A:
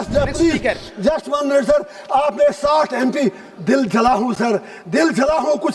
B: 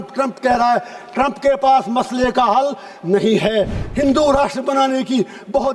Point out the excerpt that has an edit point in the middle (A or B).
B